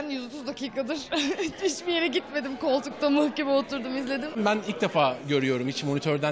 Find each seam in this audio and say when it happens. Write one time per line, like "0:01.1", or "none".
0:04.3